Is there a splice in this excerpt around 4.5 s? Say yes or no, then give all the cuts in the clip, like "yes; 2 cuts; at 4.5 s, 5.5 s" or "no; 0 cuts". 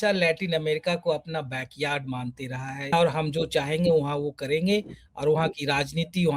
no; 1 cut; at 2.9 s